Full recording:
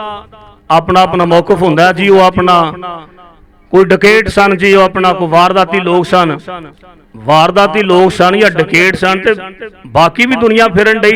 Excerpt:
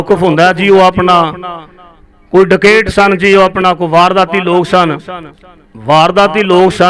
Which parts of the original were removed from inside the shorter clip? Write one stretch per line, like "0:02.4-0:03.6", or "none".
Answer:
none